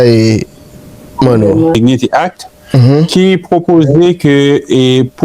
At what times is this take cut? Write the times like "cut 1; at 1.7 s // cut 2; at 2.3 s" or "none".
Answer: cut 1; at 1.7 s

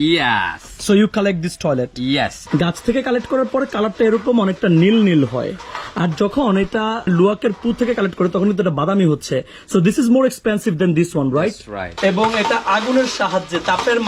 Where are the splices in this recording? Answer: cut 1; at 2.4 s // cut 2; at 7.1 s // cut 3; at 11.8 s

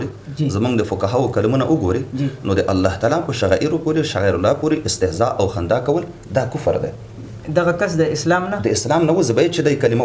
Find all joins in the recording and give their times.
none

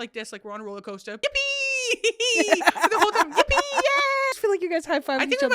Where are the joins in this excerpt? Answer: cut 1; at 1.2 s // cut 2; at 4.3 s

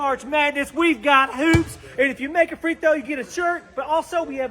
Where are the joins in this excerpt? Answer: none

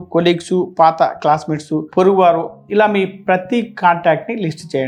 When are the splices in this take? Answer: none

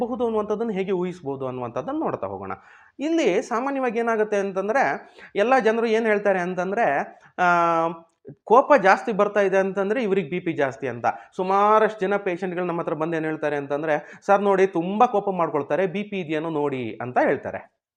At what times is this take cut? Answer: none

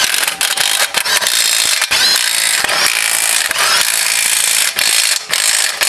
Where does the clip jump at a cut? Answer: none

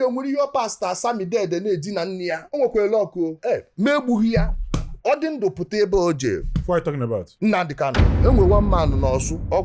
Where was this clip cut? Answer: cut 1; at 2.4 s // cut 2; at 6.4 s // cut 3; at 8.0 s

